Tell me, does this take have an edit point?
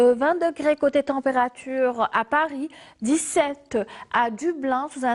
no; 0 cuts

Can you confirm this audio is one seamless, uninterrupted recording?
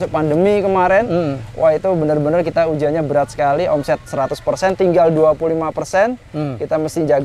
yes; 0 cuts

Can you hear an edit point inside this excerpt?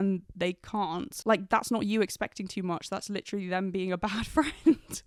no; 0 cuts

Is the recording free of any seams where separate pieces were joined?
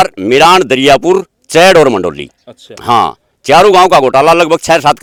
yes; 0 cuts

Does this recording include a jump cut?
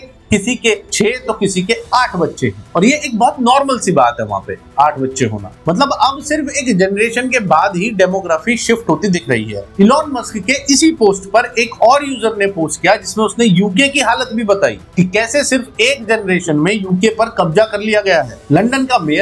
no; 0 cuts

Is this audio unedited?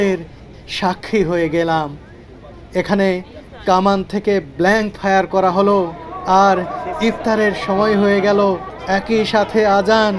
yes; 0 cuts

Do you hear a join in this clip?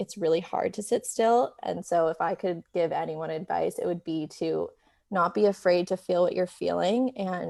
no; 0 cuts

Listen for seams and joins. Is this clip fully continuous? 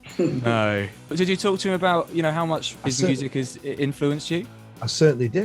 no; 2 cuts; at 1.1 s, 2.7 s

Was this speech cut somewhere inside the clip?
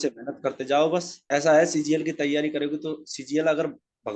yes; 1 cut; at 1.1 s

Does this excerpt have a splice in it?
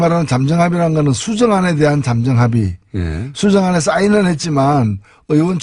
yes; 1 cut; at 2.9 s

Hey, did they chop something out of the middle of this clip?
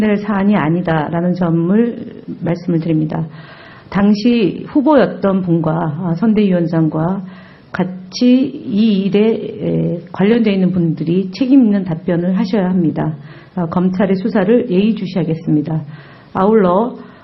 no; 0 cuts

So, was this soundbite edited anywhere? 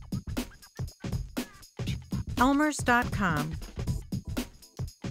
yes; 2 cuts; at 2.4 s, 3.6 s

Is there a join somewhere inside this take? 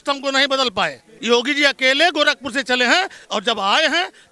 yes; 1 cut; at 1.1 s

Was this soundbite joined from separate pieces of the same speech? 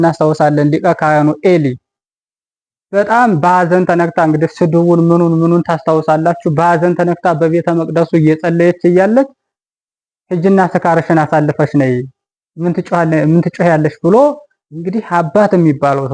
no; 0 cuts

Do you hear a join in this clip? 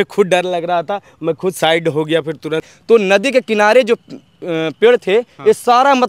yes; 1 cut; at 2.7 s

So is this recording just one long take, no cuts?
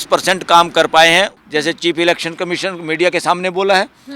no; 1 cut; at 1.4 s

